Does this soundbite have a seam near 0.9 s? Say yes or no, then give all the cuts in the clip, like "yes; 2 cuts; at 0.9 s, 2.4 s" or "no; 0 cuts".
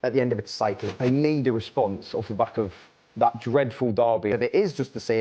yes; 2 cuts; at 0.9 s, 4.3 s